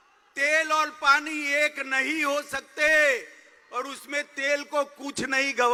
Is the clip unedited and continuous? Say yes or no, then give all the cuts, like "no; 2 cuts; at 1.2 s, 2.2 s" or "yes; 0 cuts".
yes; 0 cuts